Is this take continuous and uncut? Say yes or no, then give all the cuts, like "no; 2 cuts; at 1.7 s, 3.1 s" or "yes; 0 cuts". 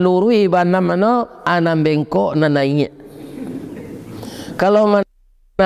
yes; 0 cuts